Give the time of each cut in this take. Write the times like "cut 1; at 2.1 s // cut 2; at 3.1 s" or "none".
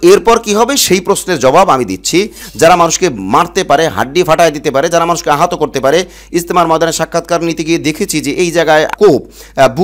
cut 1; at 2.4 s